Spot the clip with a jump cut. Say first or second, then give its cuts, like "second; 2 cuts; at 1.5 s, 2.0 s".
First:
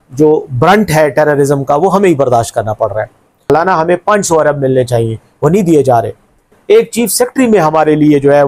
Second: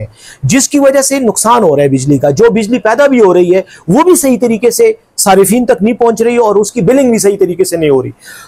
first; 2 cuts; at 3.5 s, 6.6 s